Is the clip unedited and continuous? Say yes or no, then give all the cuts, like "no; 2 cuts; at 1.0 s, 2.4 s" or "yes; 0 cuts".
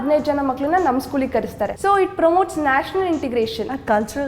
no; 1 cut; at 1.8 s